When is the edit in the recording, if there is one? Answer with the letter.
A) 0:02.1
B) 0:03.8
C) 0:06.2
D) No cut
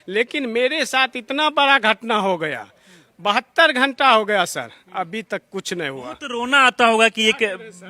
D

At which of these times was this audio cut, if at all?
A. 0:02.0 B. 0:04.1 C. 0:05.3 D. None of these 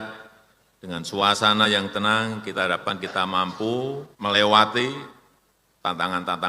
B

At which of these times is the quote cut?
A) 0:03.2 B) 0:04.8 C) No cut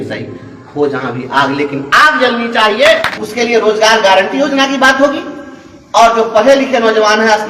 A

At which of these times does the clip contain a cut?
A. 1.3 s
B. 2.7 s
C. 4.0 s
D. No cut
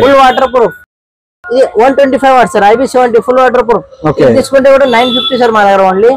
A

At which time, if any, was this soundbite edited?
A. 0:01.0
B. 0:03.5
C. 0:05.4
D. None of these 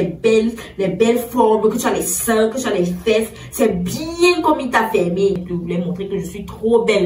C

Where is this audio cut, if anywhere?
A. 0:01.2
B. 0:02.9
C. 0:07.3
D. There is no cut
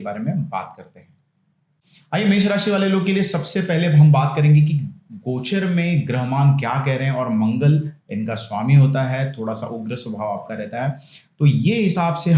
D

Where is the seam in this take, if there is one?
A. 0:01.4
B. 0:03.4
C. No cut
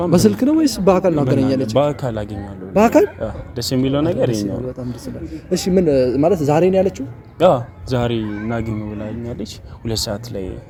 C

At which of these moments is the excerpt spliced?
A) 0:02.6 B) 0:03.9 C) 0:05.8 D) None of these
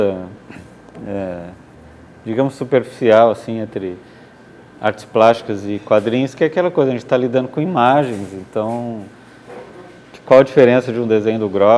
D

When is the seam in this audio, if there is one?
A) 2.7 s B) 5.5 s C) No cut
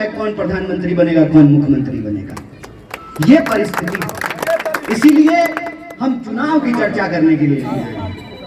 C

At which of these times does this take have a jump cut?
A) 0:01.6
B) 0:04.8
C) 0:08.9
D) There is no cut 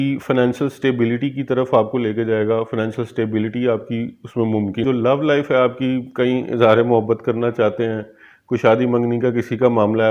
B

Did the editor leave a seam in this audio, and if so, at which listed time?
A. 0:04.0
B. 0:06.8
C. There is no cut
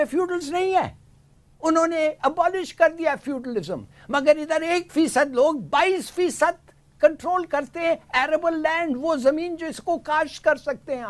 C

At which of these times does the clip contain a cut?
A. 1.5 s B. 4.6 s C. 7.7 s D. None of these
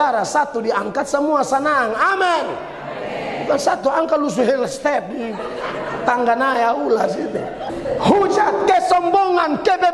C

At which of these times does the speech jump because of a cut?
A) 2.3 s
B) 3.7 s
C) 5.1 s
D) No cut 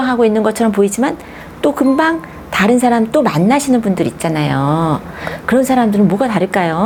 D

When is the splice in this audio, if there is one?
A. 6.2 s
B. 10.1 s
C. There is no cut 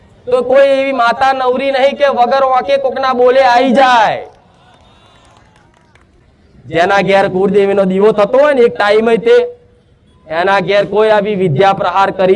A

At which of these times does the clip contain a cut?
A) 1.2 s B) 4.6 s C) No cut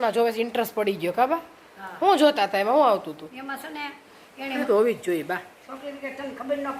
B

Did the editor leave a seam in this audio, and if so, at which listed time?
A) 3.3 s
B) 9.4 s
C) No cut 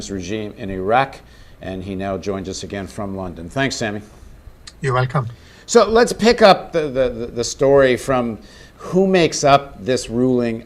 B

